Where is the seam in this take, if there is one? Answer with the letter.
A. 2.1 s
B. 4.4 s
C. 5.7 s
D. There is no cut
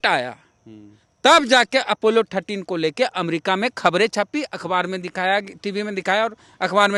D